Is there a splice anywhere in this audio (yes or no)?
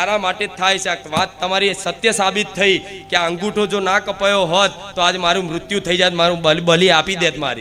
no